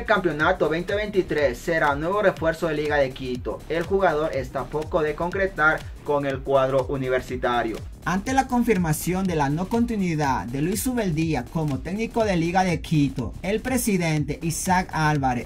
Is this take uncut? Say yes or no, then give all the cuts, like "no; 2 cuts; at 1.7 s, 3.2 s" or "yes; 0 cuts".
yes; 0 cuts